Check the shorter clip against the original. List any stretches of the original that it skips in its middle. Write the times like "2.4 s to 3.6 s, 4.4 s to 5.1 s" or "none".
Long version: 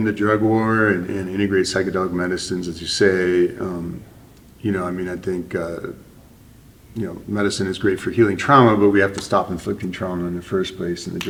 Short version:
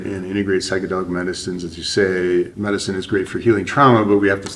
3.6 s to 7.2 s

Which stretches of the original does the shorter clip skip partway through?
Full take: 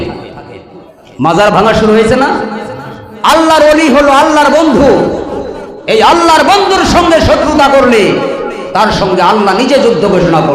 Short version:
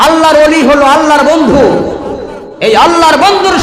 none

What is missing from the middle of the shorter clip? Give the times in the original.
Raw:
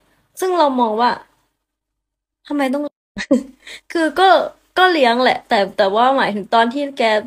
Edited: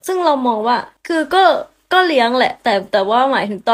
1.3 s to 3.8 s

